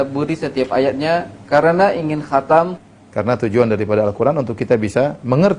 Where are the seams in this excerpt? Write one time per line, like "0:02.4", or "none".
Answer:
0:02.9